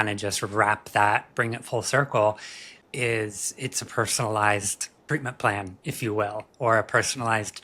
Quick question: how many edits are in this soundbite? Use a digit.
2